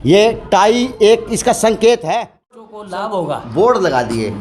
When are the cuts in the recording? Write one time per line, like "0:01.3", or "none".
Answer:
0:02.7